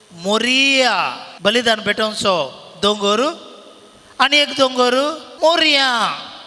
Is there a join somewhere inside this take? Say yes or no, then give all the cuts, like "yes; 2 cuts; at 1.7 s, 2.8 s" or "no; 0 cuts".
yes; 2 cuts; at 1.2 s, 5.2 s